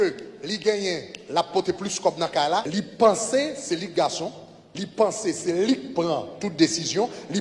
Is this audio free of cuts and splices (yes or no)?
no